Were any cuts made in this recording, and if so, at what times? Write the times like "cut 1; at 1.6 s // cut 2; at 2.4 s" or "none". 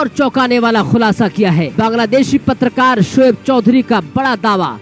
cut 1; at 1.7 s